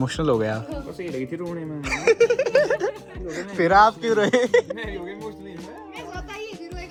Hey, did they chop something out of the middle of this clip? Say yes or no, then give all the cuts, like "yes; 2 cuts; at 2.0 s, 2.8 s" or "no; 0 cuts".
no; 0 cuts